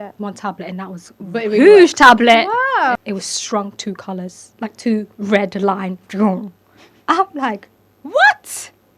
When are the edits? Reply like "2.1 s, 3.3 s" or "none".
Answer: 3.0 s

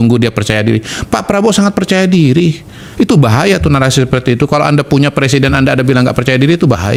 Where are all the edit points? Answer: none

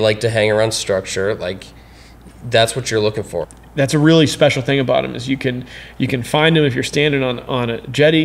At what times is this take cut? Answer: 3.6 s

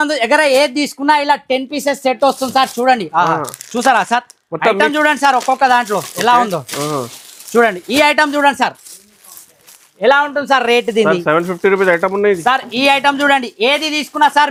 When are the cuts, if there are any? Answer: none

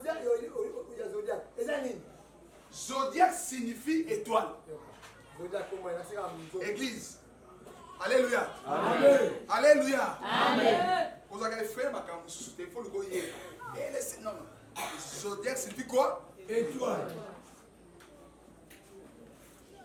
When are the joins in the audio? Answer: none

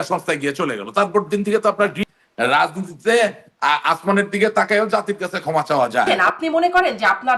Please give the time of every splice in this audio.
2.0 s, 6.1 s

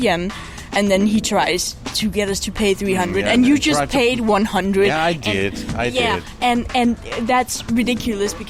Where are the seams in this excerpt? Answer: none

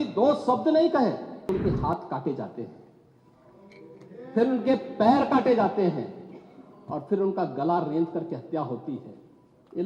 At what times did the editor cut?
1.5 s

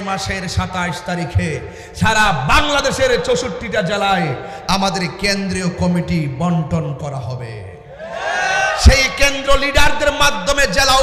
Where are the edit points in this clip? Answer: none

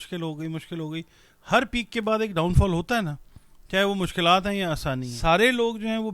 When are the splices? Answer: 5.1 s

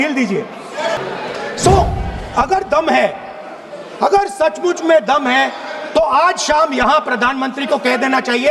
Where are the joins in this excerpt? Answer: 1.0 s

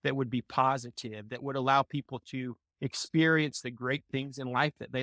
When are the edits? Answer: none

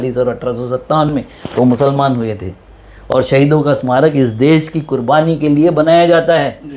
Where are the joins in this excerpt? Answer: none

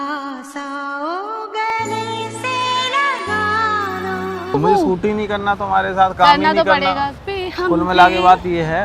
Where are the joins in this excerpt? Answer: 4.5 s, 7.2 s

